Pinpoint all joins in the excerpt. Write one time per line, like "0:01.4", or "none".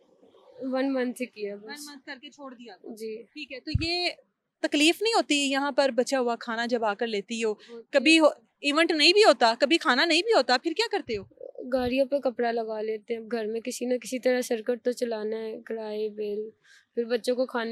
none